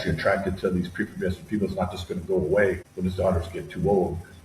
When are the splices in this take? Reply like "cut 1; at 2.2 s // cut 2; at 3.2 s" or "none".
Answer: cut 1; at 2.9 s